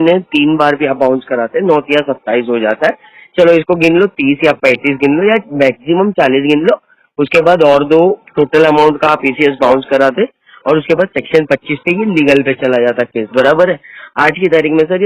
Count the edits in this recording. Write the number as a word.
zero